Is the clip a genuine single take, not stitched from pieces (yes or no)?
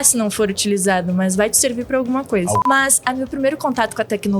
no